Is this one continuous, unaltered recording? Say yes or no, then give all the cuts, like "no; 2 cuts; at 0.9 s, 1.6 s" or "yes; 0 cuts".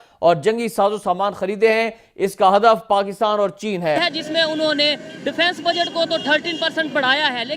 no; 1 cut; at 4.0 s